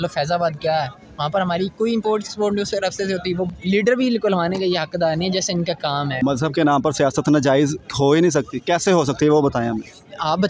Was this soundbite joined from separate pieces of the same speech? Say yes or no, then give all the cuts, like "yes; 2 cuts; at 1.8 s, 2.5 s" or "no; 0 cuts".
yes; 2 cuts; at 3.5 s, 6.2 s